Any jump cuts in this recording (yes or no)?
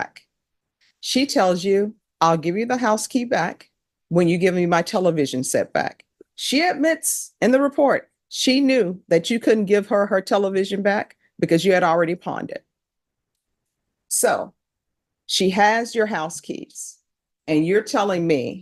no